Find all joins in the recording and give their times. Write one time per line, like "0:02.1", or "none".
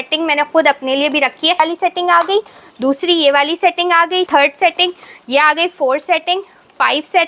0:01.6
0:04.3